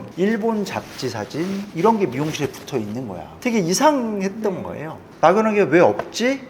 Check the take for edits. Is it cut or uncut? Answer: cut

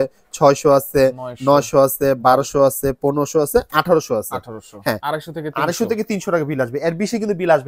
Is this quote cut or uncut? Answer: cut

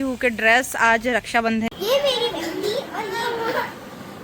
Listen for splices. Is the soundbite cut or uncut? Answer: cut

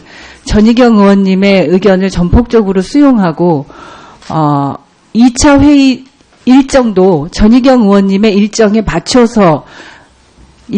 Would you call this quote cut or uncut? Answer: cut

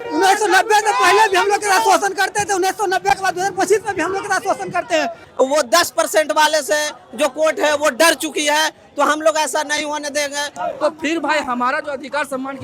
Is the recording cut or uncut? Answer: cut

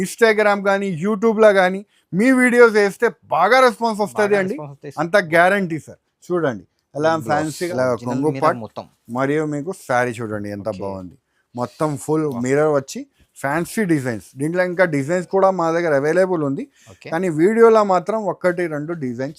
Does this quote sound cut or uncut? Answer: cut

